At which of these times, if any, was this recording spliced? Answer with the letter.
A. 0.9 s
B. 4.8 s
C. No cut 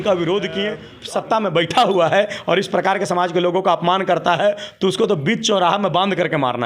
A